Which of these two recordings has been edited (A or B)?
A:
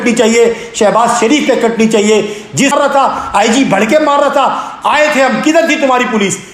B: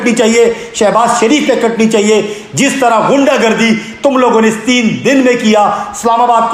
A